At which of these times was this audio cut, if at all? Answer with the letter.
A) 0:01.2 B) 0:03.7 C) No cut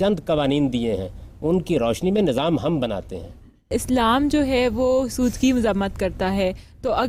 B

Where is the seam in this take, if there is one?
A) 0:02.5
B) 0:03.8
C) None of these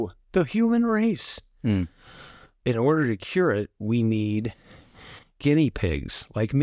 A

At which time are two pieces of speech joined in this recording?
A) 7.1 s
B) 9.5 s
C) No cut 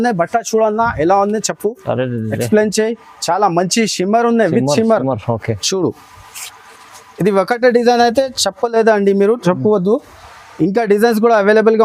C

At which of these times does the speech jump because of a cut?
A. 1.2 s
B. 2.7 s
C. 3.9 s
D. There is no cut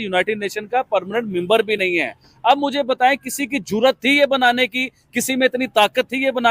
D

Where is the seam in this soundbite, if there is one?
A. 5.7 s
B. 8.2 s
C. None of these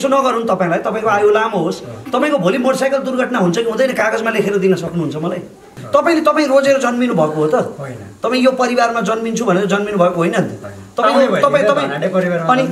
A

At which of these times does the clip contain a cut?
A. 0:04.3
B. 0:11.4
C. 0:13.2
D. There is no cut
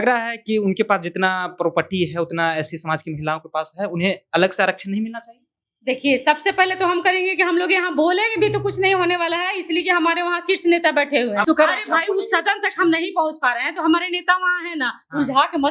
B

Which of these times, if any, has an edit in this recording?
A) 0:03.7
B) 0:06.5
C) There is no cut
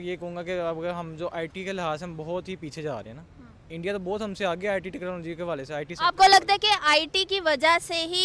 C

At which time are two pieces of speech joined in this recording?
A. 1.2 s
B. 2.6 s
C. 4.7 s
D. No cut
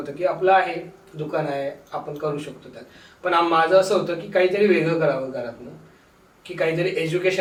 D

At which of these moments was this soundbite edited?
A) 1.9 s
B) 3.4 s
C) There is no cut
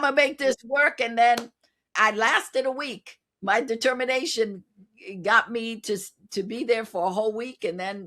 A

